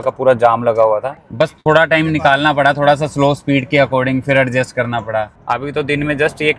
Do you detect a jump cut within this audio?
yes; 2 cuts; at 1.2 s, 5.3 s

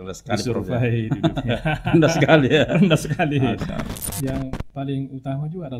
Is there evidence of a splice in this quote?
yes; 1 cut; at 4.1 s

